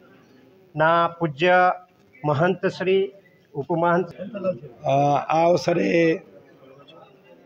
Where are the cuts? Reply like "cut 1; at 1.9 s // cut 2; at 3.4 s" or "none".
cut 1; at 4.2 s